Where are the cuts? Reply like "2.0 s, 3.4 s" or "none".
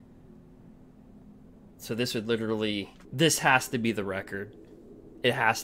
3.0 s